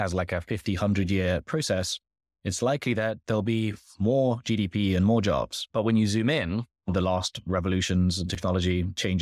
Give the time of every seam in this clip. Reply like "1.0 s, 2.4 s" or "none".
5.6 s